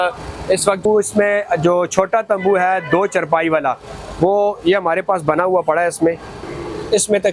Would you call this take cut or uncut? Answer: cut